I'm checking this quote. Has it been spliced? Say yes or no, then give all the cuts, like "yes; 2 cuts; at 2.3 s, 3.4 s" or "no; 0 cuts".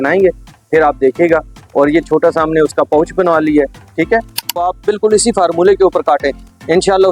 yes; 1 cut; at 4.6 s